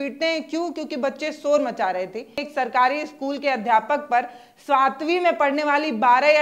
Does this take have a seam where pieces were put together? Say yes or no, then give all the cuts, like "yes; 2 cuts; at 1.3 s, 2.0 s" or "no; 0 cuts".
yes; 1 cut; at 2.5 s